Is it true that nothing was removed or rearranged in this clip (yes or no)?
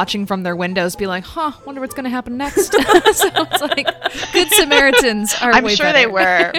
yes